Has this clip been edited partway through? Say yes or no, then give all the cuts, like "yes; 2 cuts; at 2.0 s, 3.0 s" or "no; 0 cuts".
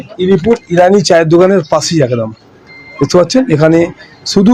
no; 0 cuts